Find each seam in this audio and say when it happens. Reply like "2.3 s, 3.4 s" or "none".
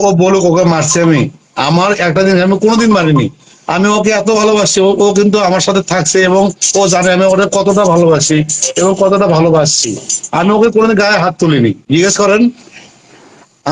none